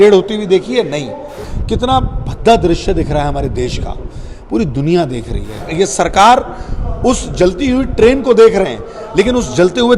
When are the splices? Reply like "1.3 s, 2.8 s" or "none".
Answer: 1.4 s, 5.7 s